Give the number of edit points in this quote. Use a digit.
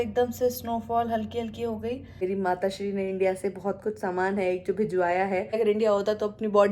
2